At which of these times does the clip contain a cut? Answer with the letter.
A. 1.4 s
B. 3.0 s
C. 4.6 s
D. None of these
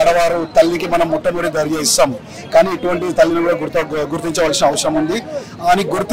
D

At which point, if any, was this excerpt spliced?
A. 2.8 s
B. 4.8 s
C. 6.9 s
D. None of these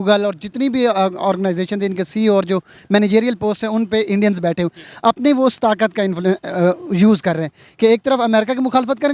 D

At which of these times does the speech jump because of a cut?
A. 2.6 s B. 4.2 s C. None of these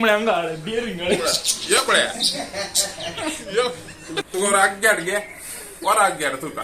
B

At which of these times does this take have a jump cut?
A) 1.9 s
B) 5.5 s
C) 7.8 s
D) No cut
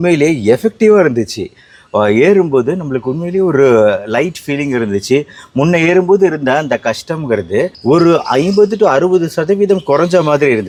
D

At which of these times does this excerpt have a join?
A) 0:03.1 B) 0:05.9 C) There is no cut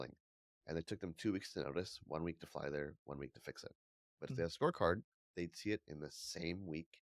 C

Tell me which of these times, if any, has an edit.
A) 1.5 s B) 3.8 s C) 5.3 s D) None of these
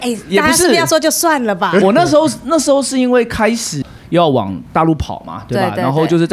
B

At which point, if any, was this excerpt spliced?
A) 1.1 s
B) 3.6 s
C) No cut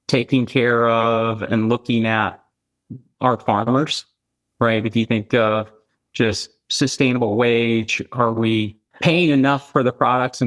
C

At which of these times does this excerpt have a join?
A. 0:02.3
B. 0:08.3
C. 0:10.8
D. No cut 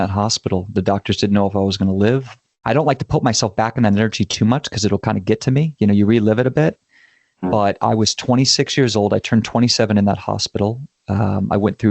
A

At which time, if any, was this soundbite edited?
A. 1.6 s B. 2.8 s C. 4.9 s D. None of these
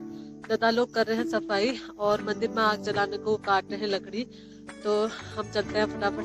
D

